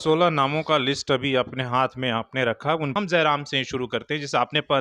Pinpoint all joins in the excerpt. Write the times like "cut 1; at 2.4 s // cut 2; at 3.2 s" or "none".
cut 1; at 2.9 s